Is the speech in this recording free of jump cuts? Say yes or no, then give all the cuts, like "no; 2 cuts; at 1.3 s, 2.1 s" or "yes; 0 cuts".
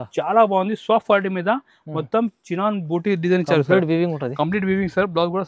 yes; 0 cuts